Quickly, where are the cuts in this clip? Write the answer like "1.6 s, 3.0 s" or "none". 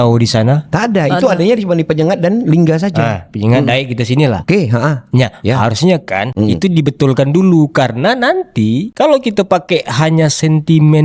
none